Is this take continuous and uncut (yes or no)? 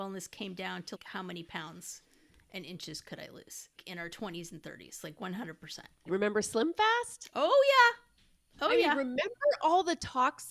no